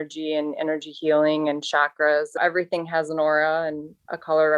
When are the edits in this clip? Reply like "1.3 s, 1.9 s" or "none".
2.4 s